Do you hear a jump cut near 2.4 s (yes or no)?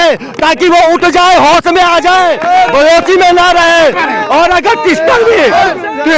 no